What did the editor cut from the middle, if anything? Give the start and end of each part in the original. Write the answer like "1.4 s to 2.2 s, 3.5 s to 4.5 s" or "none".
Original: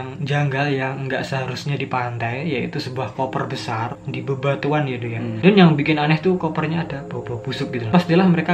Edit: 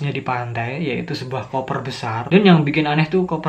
3.9 s to 5.4 s